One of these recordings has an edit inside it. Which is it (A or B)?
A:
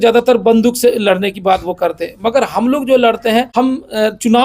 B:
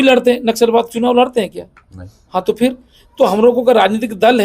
A